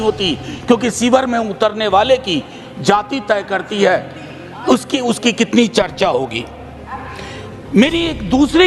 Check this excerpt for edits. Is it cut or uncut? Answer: uncut